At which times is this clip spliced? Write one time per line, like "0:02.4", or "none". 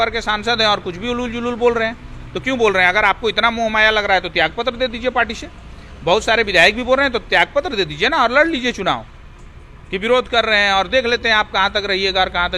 none